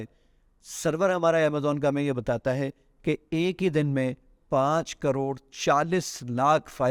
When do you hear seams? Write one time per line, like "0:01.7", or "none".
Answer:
none